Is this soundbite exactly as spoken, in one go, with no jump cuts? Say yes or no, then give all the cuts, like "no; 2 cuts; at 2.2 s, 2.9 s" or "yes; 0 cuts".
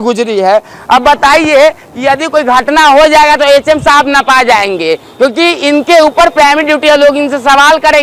yes; 0 cuts